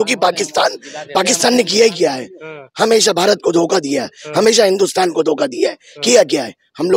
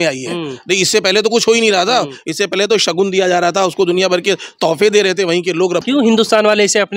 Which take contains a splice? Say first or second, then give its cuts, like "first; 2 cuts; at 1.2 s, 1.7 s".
second; 1 cut; at 5.8 s